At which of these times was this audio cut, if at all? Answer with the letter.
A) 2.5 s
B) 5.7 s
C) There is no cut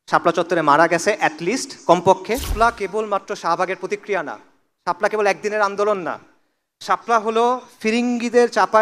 A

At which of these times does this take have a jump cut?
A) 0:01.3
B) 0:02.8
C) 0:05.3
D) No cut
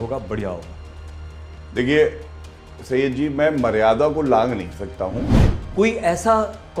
C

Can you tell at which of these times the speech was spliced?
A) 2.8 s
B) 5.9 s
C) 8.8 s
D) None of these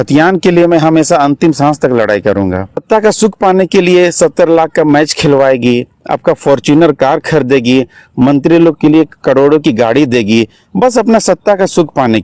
A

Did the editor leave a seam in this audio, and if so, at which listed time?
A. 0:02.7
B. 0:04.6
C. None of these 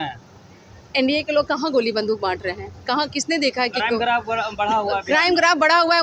C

